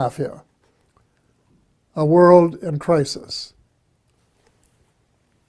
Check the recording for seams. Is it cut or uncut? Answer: uncut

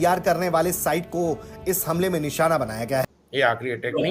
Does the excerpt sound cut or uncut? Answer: cut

